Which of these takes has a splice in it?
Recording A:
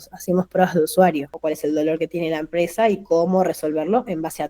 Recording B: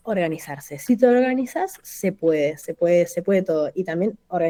A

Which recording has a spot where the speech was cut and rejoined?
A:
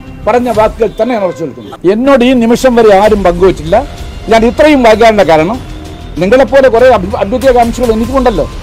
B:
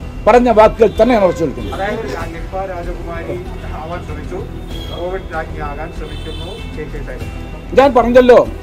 A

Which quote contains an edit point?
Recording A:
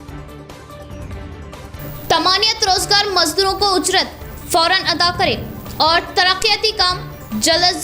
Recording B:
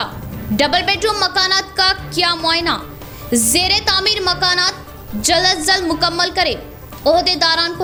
A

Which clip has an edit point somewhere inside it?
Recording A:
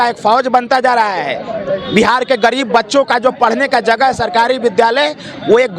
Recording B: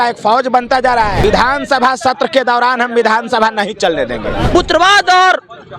B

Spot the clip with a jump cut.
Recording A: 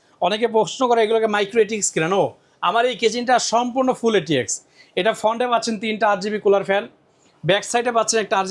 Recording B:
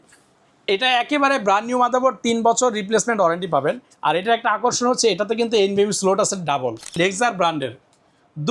B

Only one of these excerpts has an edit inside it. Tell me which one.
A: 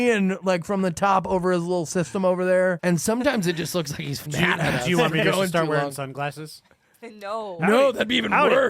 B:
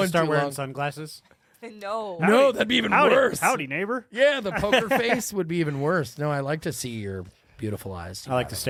A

